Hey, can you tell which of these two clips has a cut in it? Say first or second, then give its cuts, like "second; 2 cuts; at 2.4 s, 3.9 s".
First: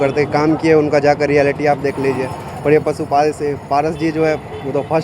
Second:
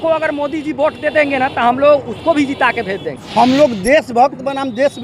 second; 1 cut; at 3.1 s